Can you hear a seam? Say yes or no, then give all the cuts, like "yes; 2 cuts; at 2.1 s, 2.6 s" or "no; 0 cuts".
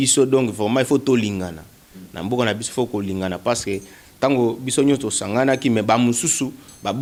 no; 0 cuts